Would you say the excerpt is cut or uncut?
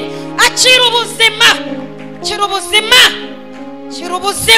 uncut